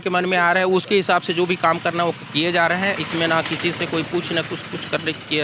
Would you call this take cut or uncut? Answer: uncut